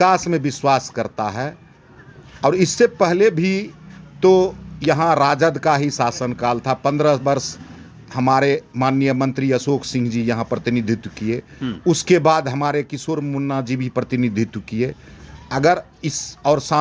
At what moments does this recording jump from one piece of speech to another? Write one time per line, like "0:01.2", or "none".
none